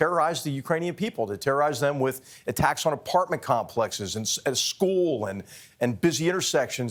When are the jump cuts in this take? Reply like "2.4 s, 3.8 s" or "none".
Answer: none